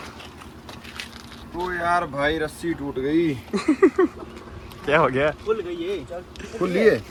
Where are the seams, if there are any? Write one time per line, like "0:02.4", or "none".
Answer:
none